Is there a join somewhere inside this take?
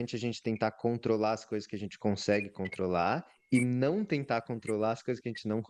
no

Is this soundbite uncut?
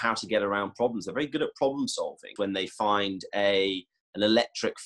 no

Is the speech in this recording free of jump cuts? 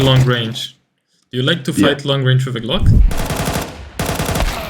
no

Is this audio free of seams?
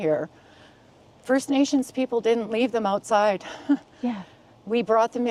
yes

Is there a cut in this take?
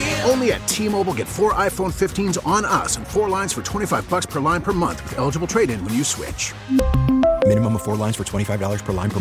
no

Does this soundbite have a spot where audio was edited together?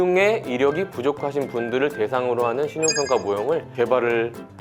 no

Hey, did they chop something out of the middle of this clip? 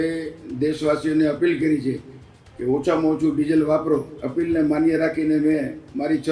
yes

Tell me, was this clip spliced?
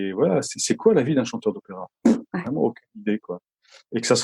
no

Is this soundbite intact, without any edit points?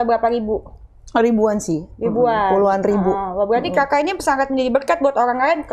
yes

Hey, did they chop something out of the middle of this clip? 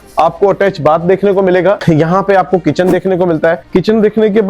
no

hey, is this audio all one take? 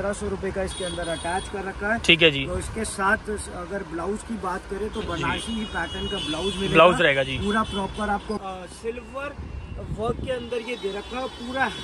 no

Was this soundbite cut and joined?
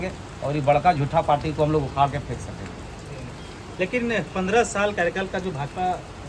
no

